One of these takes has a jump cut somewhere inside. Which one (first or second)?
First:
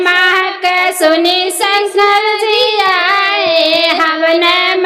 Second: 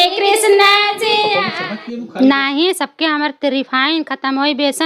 second